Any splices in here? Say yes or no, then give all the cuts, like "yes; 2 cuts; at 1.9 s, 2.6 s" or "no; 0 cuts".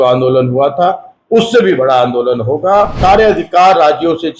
yes; 1 cut; at 3.0 s